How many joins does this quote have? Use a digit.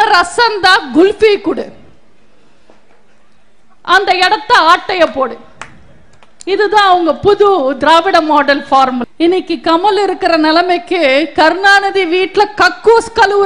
1